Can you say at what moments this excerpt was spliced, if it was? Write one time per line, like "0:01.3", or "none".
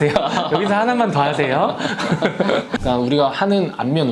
0:02.7

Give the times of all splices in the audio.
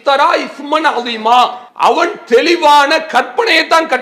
0:01.6

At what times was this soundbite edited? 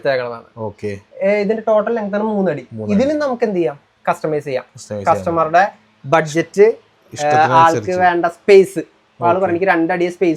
none

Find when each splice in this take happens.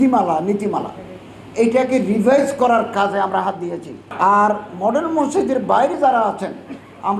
0:04.0

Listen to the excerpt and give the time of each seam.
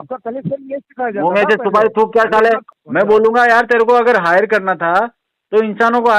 0:02.8

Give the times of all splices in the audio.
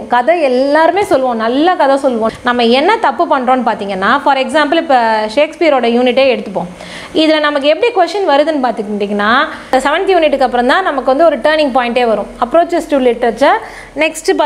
0:02.3
0:09.6

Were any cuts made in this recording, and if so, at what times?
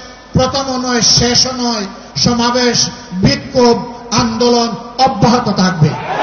none

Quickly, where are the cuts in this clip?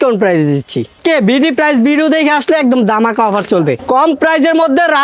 0:00.9
0:03.8

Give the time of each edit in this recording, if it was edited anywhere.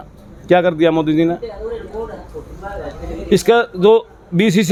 none

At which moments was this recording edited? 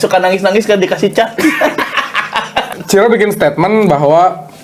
0:02.7

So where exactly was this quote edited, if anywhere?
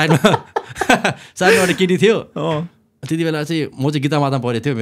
none

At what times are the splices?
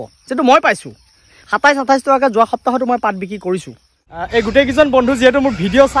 0:04.2

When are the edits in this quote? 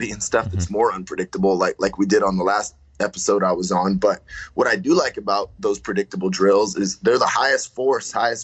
none

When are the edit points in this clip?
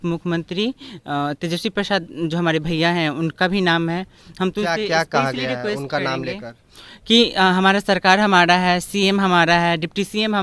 none

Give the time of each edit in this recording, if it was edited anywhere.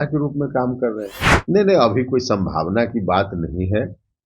0:01.3

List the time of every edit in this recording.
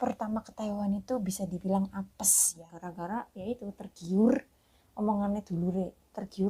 0:02.6

